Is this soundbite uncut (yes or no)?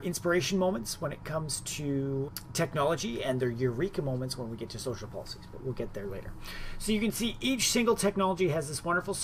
yes